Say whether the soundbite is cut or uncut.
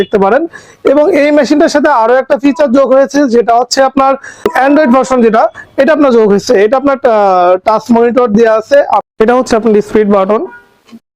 cut